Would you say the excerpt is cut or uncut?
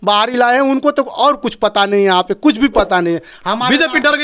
uncut